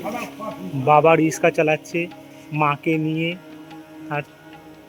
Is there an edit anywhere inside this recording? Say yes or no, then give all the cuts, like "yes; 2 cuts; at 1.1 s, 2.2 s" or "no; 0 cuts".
no; 0 cuts